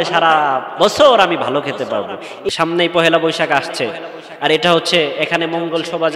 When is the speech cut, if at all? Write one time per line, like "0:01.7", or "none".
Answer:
0:02.4